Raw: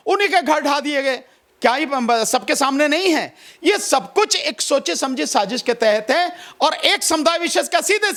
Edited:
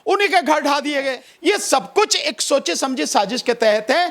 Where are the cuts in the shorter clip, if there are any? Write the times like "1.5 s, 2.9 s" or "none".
1.2 s